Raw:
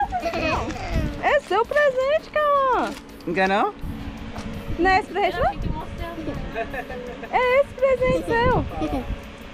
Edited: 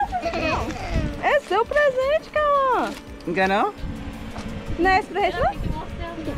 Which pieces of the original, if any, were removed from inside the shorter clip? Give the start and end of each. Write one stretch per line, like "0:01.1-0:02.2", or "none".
none